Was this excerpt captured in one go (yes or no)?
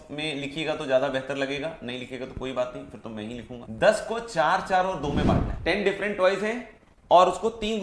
no